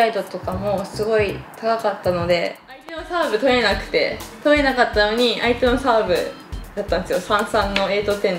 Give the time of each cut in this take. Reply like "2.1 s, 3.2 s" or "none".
3.0 s